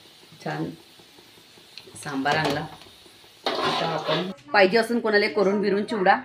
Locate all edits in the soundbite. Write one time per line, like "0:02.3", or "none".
0:04.3